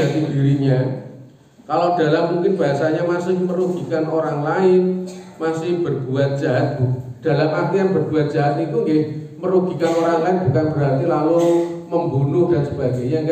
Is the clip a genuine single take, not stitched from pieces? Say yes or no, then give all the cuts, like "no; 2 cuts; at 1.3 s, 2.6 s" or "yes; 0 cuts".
yes; 0 cuts